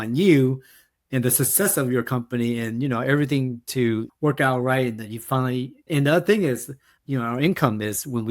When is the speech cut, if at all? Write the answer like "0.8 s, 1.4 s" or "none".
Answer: 5.9 s, 7.1 s

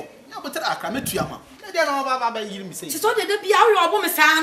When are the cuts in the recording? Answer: none

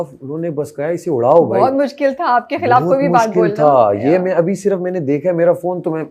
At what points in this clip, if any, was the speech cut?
none

